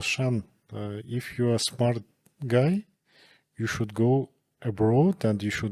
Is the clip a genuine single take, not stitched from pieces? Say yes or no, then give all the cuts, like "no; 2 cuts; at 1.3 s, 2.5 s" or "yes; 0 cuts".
yes; 0 cuts